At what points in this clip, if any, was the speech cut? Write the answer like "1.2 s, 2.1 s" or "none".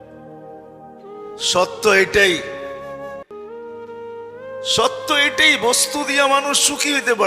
2.4 s, 4.0 s